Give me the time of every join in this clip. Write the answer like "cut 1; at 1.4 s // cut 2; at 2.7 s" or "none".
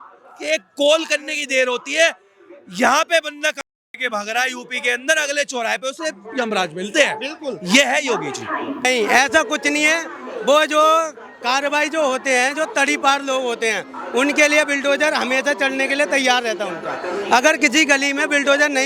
cut 1; at 8.9 s